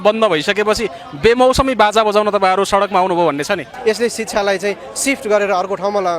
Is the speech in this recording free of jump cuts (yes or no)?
no